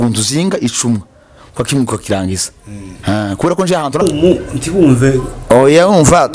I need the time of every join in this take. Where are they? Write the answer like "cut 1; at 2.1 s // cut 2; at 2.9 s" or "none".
cut 1; at 4.0 s